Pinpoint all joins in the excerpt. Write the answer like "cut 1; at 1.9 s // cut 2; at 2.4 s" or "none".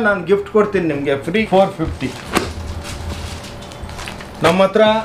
cut 1; at 1.4 s

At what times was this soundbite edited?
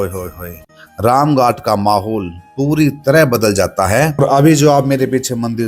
cut 1; at 4.2 s

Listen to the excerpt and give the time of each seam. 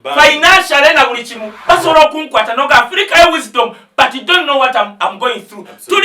cut 1; at 1.5 s

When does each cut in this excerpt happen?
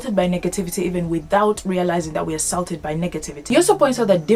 none

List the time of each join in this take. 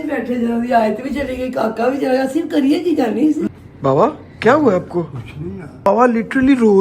cut 1; at 3.4 s // cut 2; at 5.9 s

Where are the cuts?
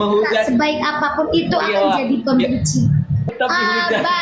cut 1; at 3.3 s

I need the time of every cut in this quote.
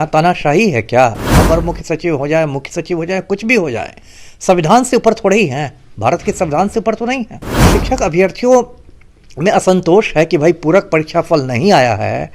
cut 1; at 1.3 s // cut 2; at 7.7 s

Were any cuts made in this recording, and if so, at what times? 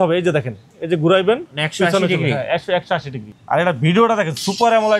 cut 1; at 3.3 s

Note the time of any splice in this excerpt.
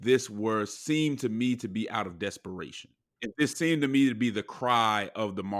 cut 1; at 3.1 s

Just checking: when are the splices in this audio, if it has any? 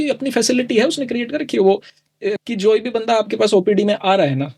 cut 1; at 2.3 s

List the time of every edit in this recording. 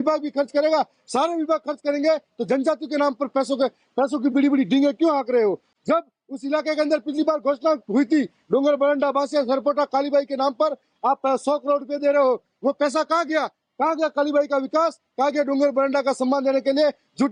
none

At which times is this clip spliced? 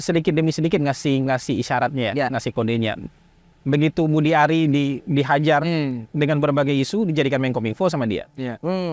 none

